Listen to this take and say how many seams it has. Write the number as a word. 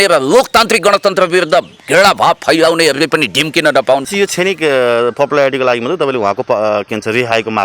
one